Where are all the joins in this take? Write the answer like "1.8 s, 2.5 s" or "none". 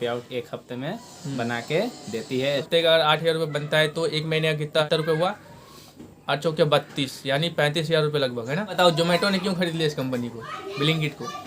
2.7 s, 4.8 s, 8.8 s